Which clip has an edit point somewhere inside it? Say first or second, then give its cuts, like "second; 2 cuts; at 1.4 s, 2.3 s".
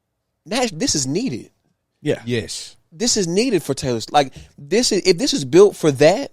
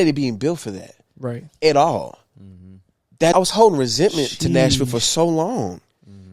second; 1 cut; at 3.3 s